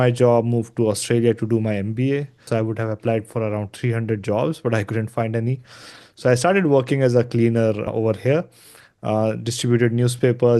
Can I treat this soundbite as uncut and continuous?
no; 2 cuts; at 2.5 s, 7.9 s

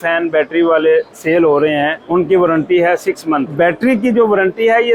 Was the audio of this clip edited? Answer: yes; 2 cuts; at 2.0 s, 3.5 s

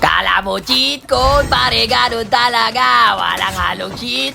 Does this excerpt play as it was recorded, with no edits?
yes; 0 cuts

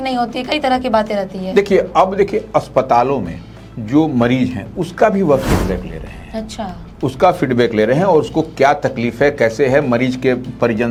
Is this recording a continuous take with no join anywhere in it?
yes; 0 cuts

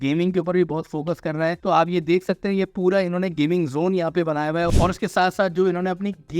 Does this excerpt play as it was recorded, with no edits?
no; 2 cuts; at 1.6 s, 4.7 s

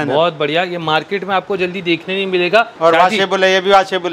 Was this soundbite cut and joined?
yes; 1 cut; at 2.7 s

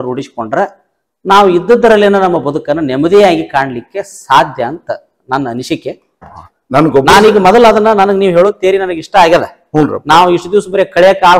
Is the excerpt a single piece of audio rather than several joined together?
no; 1 cut; at 6.3 s

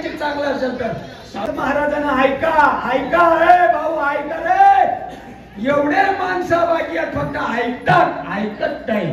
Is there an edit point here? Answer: yes; 1 cut; at 1.4 s

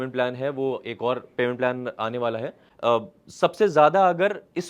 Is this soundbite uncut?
no; 1 cut; at 2.6 s

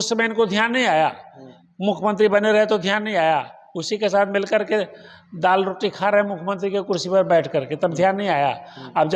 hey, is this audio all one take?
yes; 0 cuts

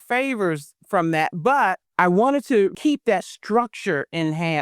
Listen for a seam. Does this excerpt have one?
yes; 2 cuts; at 1.8 s, 2.8 s

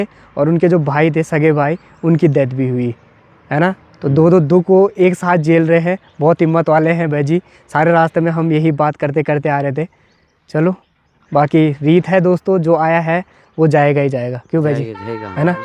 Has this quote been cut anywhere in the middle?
no; 0 cuts

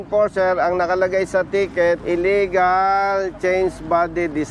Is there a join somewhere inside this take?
yes; 1 cut; at 2.0 s

